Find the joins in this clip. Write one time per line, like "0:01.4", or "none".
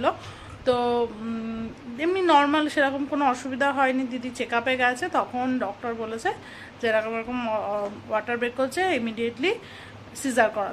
none